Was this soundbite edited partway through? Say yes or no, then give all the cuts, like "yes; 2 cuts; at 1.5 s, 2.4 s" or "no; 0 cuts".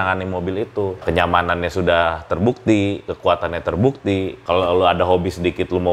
yes; 2 cuts; at 1.0 s, 4.4 s